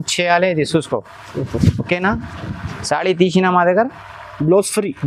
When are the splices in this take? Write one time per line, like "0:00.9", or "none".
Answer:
none